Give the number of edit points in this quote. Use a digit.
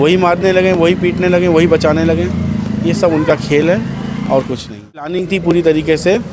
1